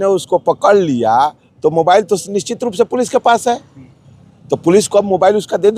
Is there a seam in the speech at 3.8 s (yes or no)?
no